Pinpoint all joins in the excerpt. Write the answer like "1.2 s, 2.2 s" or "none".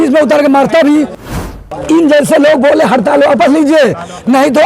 1.2 s